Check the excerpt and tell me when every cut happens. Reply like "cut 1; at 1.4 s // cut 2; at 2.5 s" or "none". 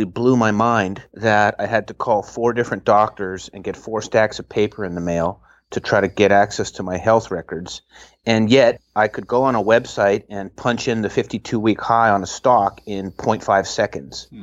cut 1; at 1.0 s // cut 2; at 8.9 s